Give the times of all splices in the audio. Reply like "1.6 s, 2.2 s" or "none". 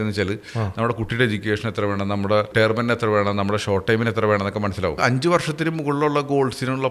2.5 s, 5.0 s

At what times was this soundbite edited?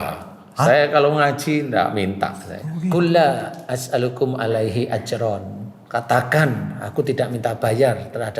2.9 s

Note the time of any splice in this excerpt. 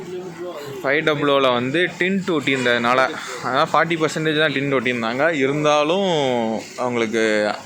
none

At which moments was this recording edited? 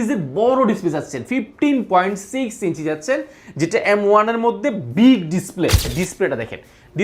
5.9 s

